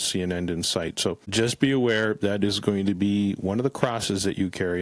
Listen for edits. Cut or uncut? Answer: cut